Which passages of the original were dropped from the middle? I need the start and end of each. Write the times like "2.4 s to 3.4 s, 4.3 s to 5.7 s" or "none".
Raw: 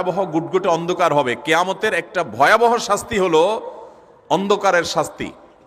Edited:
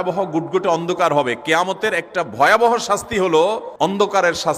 3.7 s to 4.2 s